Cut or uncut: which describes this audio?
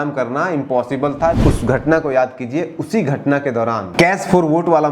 cut